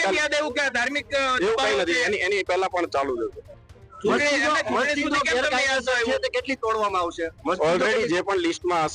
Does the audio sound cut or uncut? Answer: uncut